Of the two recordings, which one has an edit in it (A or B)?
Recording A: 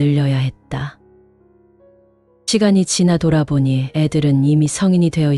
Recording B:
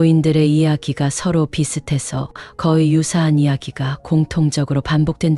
A